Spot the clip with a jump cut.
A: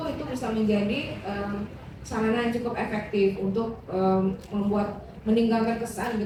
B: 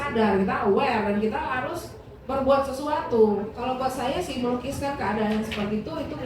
B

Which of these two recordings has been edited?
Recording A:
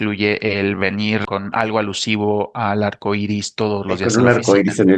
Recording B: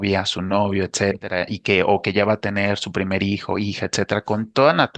A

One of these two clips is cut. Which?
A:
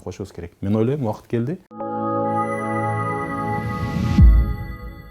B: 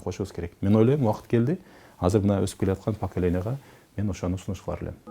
A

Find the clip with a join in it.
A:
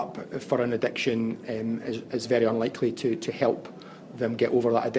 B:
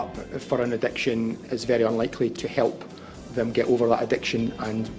B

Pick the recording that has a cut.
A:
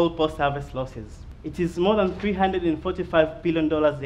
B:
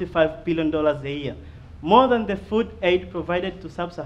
A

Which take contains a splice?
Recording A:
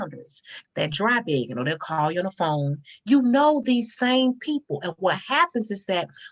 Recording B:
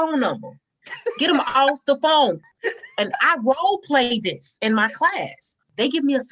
B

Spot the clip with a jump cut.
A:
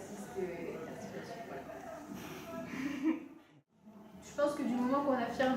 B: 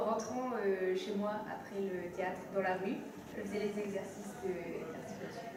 A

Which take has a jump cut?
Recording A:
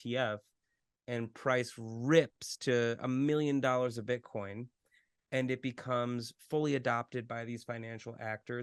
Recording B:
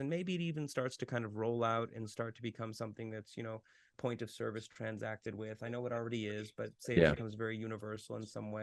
B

